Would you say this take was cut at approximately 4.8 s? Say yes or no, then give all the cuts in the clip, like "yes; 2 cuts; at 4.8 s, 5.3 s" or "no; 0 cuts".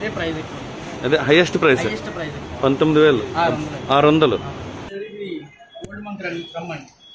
yes; 1 cut; at 4.8 s